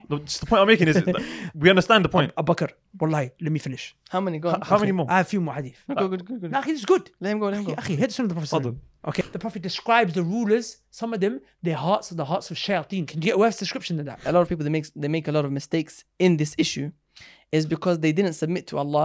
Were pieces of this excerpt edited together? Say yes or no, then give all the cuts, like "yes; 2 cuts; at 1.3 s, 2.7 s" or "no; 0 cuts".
yes; 2 cuts; at 9.2 s, 14.2 s